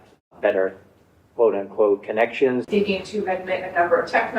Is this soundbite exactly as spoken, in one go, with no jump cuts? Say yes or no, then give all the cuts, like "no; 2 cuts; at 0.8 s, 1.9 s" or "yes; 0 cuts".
no; 1 cut; at 2.7 s